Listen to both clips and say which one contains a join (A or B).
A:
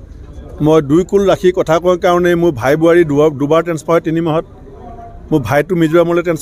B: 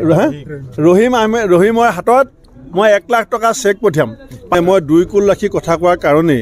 B